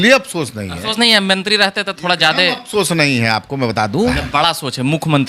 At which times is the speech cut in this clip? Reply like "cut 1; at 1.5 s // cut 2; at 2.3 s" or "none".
cut 1; at 4.2 s